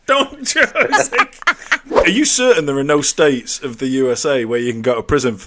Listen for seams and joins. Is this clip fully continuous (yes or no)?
no